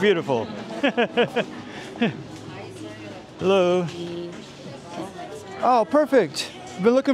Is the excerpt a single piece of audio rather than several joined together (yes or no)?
yes